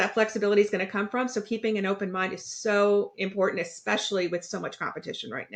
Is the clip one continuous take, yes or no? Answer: yes